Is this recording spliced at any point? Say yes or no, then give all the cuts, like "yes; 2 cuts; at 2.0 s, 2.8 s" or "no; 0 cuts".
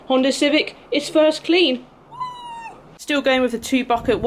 no; 0 cuts